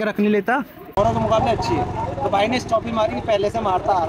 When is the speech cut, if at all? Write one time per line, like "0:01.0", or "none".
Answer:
0:01.0